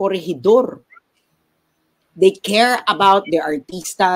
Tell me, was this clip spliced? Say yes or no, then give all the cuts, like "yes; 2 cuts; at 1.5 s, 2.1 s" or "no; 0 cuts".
yes; 1 cut; at 2.0 s